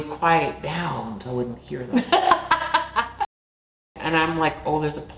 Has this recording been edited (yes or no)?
yes